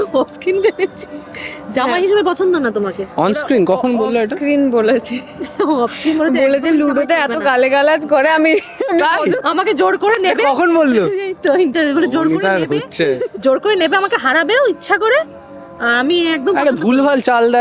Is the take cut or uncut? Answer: uncut